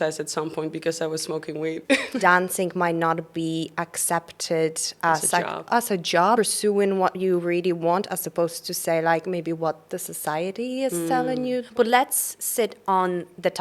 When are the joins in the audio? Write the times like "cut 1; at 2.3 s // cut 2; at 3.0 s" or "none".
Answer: cut 1; at 2.1 s // cut 2; at 6.4 s // cut 3; at 11.7 s